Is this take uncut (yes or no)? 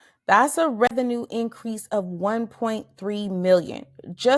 no